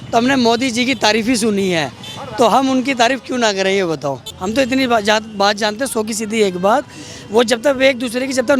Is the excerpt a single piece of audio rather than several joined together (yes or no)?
yes